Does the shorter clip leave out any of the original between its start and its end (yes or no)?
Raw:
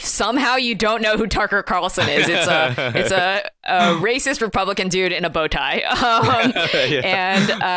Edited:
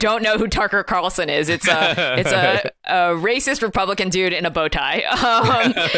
no